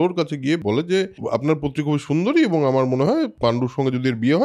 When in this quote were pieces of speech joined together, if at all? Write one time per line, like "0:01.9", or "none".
0:01.2
0:03.3